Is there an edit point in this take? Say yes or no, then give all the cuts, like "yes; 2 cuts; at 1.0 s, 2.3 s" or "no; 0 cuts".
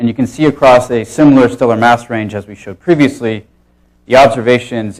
no; 0 cuts